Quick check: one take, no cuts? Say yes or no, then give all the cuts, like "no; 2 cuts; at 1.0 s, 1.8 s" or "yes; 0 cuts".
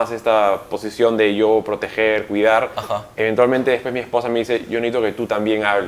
yes; 0 cuts